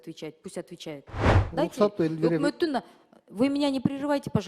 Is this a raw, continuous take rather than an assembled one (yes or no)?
no